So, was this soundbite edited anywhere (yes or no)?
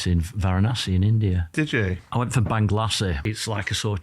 yes